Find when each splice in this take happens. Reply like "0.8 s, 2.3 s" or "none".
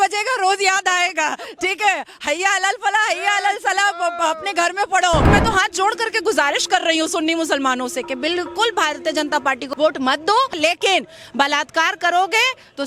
5.3 s, 9.6 s, 10.6 s